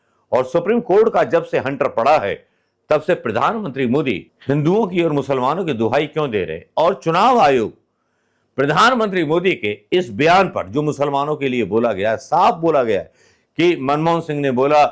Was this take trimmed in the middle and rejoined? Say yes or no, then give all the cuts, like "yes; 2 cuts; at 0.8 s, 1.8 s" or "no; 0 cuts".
yes; 1 cut; at 4.3 s